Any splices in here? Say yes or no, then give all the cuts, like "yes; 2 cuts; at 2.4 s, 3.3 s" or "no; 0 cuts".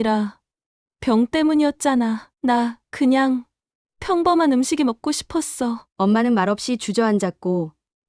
no; 0 cuts